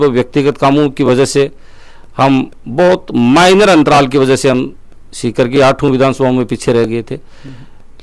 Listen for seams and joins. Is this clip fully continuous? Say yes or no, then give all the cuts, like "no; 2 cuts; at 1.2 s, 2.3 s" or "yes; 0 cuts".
yes; 0 cuts